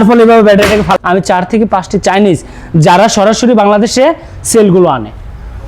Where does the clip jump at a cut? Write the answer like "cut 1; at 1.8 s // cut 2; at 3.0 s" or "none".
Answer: cut 1; at 0.9 s